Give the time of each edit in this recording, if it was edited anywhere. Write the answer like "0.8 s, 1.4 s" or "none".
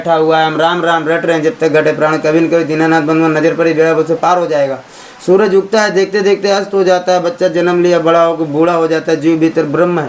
none